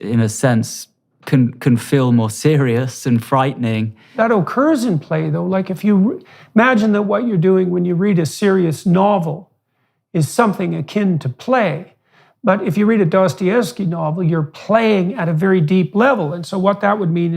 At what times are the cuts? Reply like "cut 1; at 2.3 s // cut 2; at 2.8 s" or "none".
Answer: cut 1; at 4.1 s